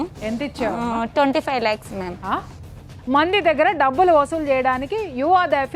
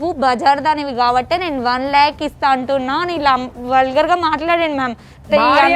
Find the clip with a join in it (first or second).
first